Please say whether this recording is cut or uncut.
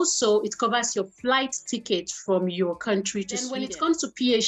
cut